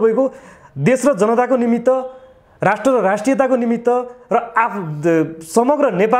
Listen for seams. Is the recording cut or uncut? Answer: uncut